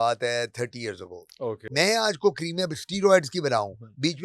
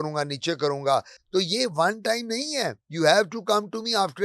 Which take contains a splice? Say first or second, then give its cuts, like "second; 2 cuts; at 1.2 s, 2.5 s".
first; 1 cut; at 1.7 s